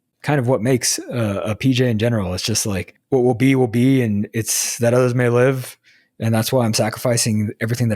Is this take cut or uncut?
cut